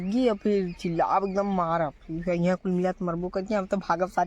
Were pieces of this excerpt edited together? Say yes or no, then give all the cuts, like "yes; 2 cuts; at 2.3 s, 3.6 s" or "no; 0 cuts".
no; 0 cuts